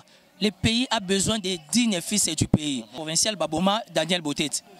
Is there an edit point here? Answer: yes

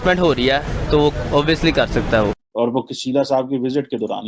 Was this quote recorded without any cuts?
no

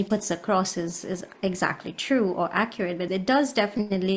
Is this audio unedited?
no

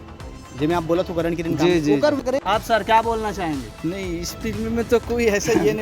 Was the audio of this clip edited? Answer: yes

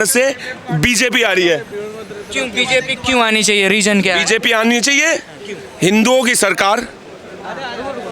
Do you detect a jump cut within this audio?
no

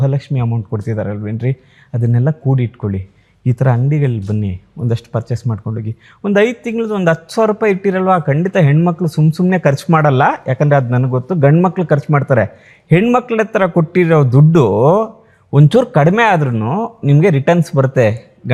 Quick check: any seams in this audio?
no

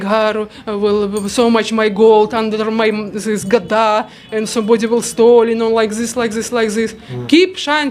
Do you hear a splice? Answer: no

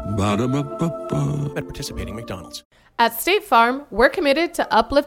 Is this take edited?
yes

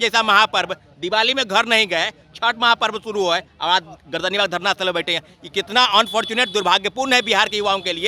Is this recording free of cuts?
yes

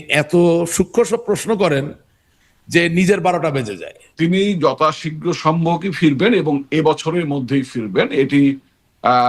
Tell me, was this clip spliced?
yes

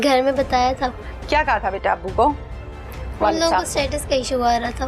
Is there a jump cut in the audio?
yes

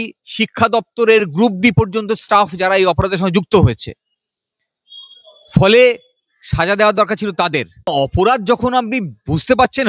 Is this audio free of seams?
no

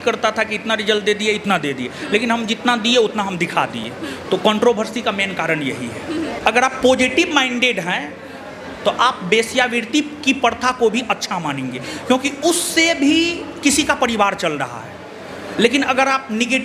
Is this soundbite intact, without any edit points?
yes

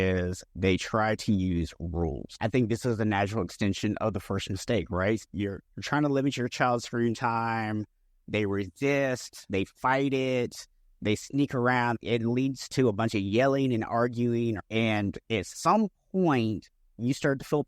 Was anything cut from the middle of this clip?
yes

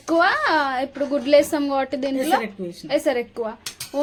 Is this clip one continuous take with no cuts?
yes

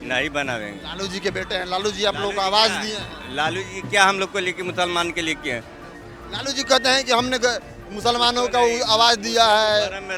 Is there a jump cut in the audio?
no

